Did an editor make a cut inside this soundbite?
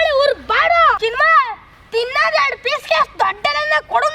yes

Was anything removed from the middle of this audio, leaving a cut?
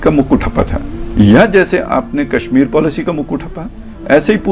no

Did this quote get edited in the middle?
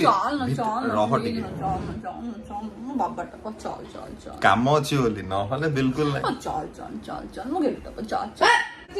no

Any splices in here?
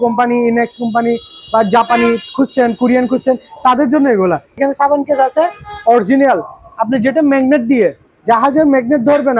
yes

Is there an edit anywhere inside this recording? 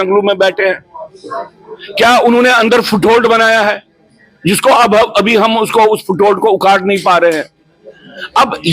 no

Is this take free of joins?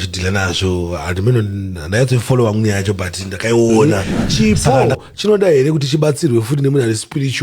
no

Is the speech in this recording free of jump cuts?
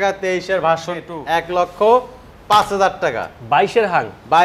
no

